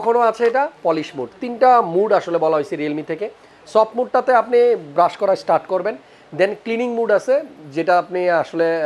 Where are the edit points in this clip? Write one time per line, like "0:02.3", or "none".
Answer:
none